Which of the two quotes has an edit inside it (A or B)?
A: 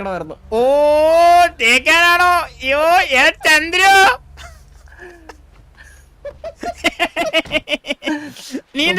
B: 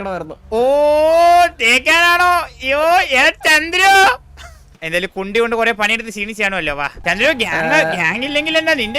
B